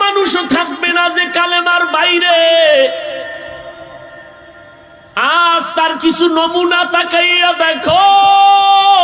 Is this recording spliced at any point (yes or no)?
no